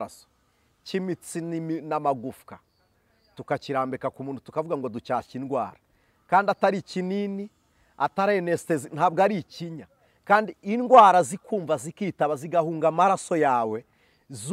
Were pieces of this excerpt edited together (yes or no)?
no